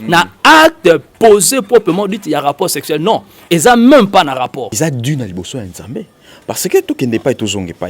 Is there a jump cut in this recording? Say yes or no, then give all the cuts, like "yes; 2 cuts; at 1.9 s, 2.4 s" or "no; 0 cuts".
yes; 1 cut; at 4.7 s